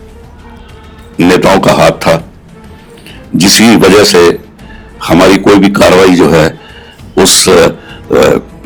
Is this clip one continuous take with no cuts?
yes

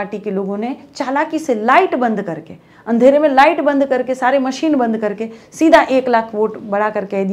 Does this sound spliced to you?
no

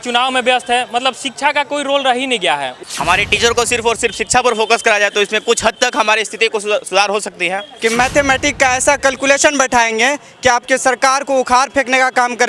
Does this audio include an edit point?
yes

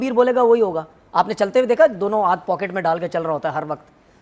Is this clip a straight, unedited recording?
yes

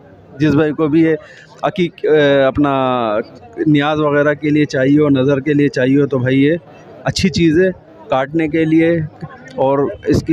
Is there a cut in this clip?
no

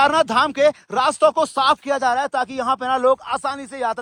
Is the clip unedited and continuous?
yes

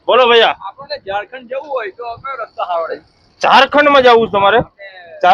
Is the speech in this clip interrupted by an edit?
no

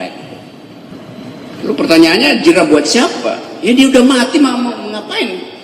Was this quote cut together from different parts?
yes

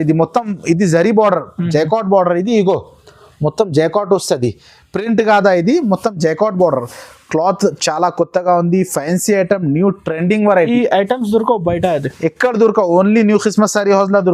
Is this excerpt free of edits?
yes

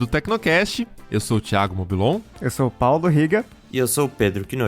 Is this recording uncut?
no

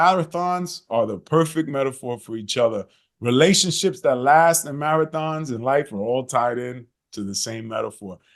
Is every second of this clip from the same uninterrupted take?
yes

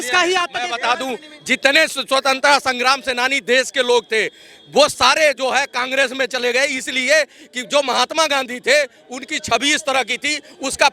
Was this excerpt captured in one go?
yes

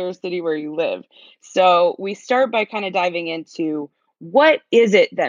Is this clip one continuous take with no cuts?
yes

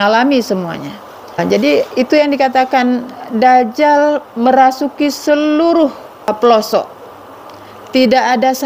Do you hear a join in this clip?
yes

